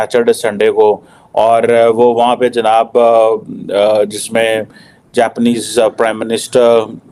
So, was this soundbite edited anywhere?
no; 0 cuts

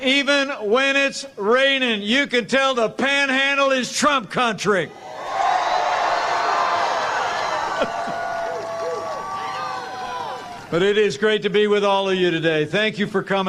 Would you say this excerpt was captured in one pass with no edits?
no; 1 cut; at 10.5 s

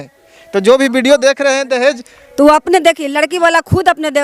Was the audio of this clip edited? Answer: no; 0 cuts

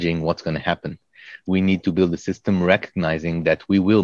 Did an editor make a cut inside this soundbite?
yes; 1 cut; at 1.3 s

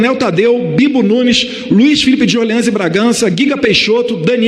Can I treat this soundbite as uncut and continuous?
yes; 0 cuts

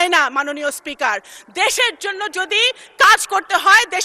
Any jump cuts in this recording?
no; 0 cuts

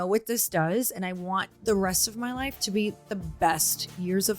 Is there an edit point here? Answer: yes; 2 cuts; at 1.5 s, 3.1 s

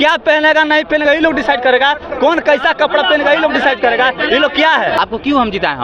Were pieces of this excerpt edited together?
yes; 1 cut; at 4.9 s

